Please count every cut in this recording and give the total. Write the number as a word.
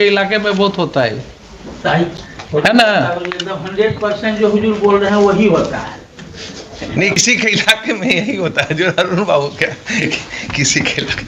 zero